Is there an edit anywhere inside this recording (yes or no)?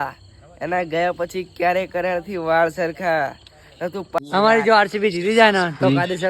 yes